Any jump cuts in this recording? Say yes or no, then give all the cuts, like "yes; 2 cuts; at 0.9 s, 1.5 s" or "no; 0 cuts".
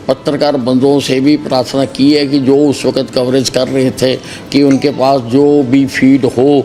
no; 0 cuts